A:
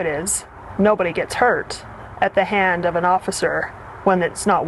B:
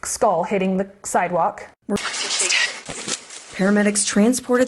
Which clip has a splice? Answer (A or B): B